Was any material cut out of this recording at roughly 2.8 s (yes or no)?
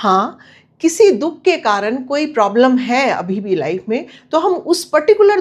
no